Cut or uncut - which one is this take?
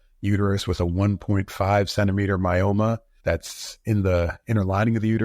cut